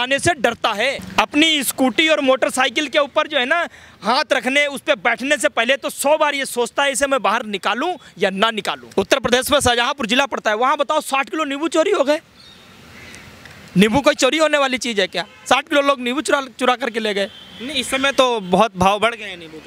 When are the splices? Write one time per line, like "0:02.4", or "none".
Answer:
0:01.0
0:08.8